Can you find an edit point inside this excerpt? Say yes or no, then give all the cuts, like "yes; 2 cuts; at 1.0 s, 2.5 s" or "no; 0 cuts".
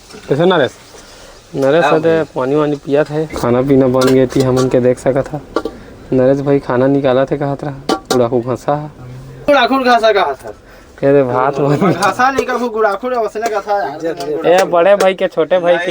yes; 1 cut; at 3.3 s